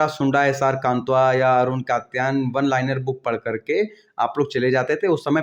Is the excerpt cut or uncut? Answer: uncut